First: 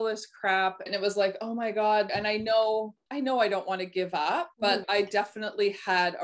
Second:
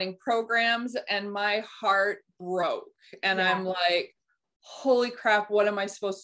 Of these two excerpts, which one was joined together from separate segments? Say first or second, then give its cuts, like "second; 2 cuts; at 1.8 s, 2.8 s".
first; 4 cuts; at 0.9 s, 2.1 s, 3.0 s, 4.8 s